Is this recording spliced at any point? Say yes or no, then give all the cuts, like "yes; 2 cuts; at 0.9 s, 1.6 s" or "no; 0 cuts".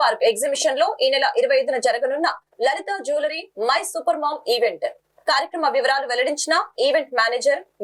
no; 0 cuts